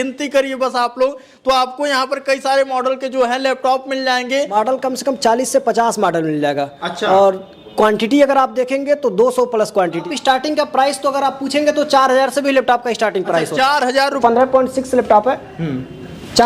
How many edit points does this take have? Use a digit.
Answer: 3